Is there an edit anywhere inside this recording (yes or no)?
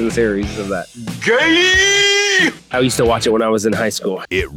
yes